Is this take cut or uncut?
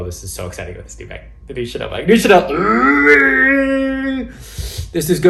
uncut